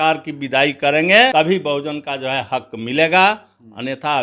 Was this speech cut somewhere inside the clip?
yes; 1 cut; at 1.3 s

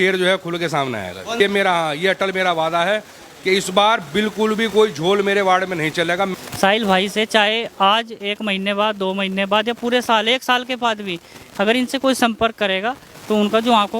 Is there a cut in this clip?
yes; 2 cuts; at 1.4 s, 6.3 s

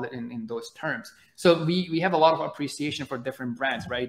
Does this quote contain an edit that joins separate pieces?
no; 0 cuts

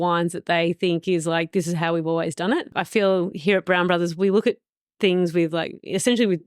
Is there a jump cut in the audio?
yes; 1 cut; at 2.7 s

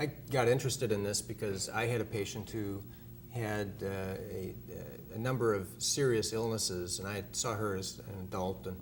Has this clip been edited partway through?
no; 0 cuts

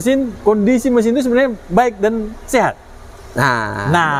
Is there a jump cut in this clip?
no; 0 cuts

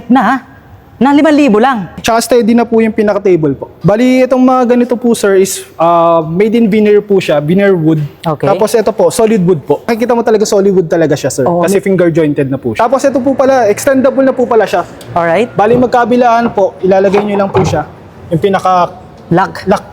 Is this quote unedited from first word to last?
no; 4 cuts; at 2.0 s, 3.7 s, 10.0 s, 12.7 s

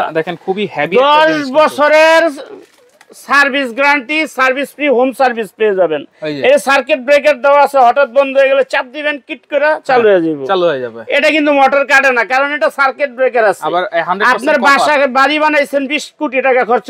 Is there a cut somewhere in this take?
no; 0 cuts

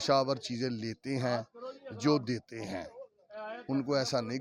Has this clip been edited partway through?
no; 0 cuts

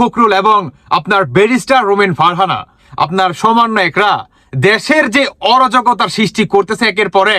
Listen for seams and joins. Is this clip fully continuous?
no; 1 cut; at 2.8 s

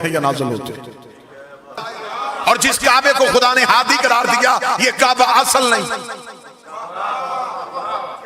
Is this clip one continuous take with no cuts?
no; 1 cut; at 1.7 s

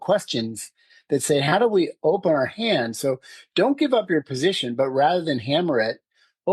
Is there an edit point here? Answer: no; 0 cuts

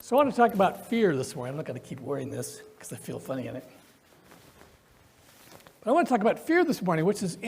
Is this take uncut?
no; 1 cut; at 5.4 s

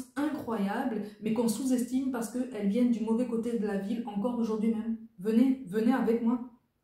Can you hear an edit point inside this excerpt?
yes; 1 cut; at 5.1 s

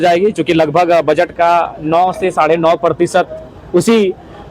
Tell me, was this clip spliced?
no; 0 cuts

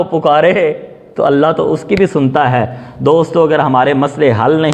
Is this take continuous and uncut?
yes; 0 cuts

